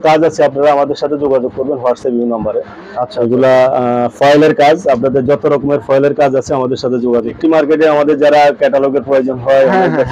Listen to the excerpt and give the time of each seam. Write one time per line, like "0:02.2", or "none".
0:07.4